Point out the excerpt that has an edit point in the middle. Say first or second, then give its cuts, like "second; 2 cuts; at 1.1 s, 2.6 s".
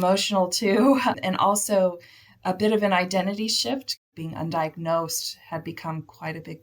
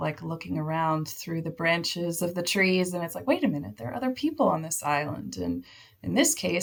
first; 1 cut; at 4.0 s